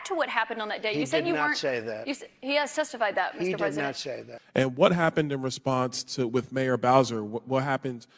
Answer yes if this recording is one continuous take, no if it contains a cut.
no